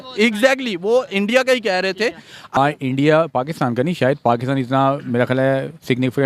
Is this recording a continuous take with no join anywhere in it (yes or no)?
no